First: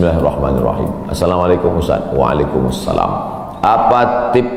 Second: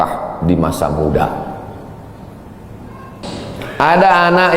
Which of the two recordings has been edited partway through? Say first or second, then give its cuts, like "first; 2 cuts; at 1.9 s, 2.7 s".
second; 1 cut; at 3.5 s